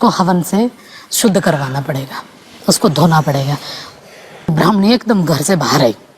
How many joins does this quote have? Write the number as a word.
one